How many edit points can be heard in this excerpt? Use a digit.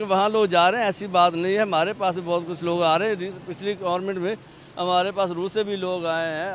0